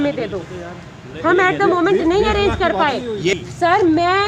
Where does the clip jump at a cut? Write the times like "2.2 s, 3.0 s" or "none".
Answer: 3.3 s